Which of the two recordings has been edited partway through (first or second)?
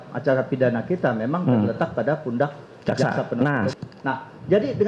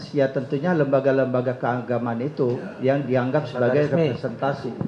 first